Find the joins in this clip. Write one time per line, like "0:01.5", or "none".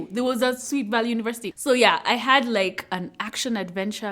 none